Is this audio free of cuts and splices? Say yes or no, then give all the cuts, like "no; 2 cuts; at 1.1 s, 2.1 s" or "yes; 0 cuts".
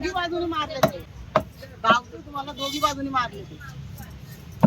no; 1 cut; at 1.1 s